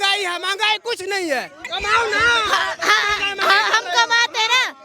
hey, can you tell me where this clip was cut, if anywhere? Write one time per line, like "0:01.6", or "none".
0:01.6